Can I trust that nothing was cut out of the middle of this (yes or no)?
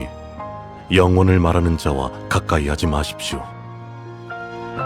no